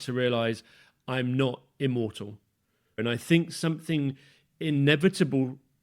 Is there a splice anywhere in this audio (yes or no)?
yes